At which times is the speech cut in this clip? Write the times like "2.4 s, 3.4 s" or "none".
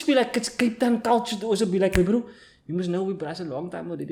none